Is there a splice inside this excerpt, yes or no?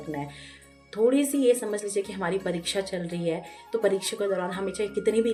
no